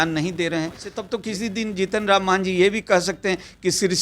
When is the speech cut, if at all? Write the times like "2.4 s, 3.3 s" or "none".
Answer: 1.1 s